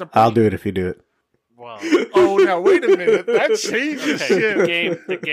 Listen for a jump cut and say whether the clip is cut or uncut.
uncut